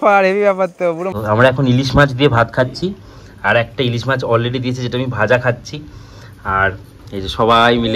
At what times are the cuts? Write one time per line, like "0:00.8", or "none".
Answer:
0:01.1